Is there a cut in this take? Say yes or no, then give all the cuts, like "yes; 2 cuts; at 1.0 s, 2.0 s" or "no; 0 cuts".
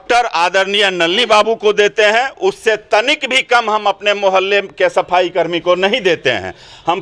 no; 0 cuts